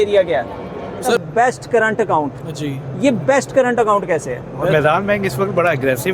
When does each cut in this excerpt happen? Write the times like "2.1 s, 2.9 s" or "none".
1.2 s, 4.7 s